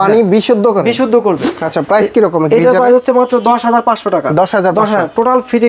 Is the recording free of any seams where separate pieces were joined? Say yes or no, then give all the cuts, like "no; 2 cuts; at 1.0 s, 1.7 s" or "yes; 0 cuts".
no; 1 cut; at 1.6 s